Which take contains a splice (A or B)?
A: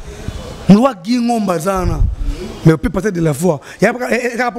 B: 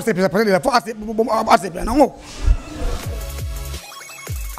B